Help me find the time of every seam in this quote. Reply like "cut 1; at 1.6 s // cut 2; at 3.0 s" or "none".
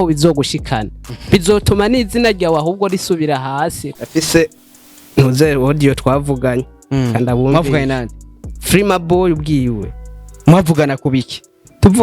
cut 1; at 3.8 s